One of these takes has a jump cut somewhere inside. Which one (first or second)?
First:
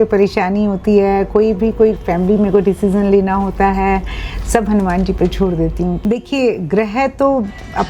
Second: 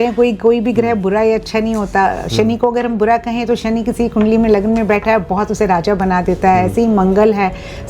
first